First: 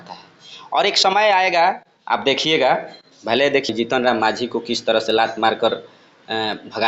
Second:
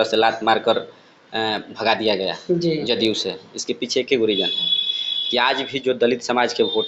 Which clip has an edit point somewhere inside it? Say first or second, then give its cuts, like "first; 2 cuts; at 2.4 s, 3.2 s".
first; 1 cut; at 3.7 s